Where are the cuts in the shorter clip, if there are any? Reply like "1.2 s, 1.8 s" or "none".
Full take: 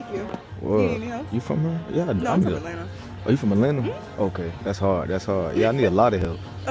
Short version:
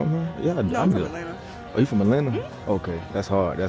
none